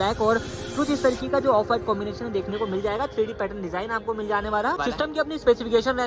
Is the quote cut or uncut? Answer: cut